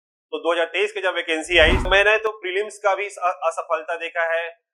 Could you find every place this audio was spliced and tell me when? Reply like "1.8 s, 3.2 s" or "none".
1.8 s